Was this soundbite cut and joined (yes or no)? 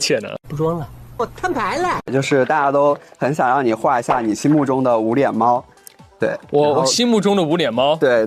no